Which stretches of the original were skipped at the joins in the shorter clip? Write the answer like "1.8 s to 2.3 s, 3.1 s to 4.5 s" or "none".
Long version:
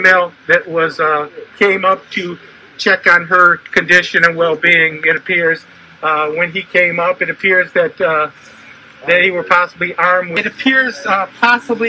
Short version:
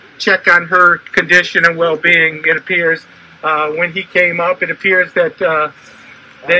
none